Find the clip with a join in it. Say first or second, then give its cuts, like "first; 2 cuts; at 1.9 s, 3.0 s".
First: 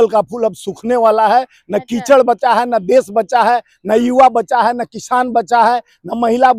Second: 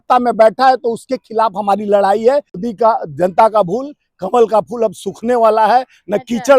second; 1 cut; at 2.6 s